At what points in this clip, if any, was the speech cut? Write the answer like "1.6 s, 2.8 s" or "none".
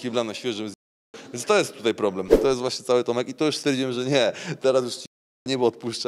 2.3 s